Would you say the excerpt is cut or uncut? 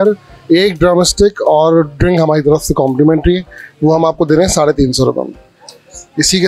uncut